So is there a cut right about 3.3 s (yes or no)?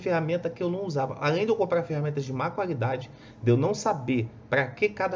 no